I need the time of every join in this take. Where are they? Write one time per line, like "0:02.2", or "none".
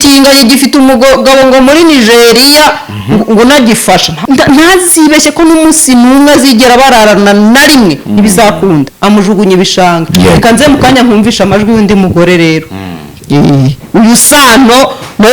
0:04.1
0:08.9